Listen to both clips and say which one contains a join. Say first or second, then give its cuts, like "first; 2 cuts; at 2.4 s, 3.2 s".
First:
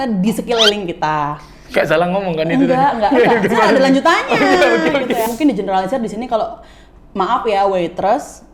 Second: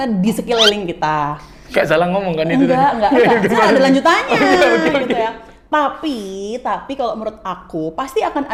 first; 1 cut; at 5.3 s